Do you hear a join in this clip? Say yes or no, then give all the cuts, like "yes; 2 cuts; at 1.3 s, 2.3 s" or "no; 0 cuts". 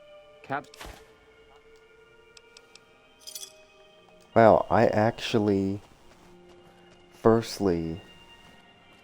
yes; 1 cut; at 4.3 s